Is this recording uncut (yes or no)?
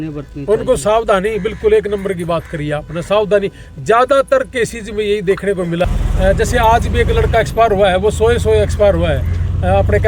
no